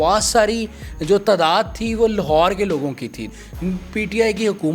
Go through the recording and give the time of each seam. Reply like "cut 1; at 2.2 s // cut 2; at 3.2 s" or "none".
cut 1; at 3.2 s